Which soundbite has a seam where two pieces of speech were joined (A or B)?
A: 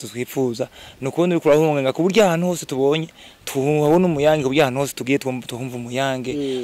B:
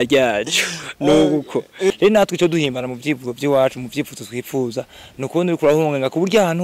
B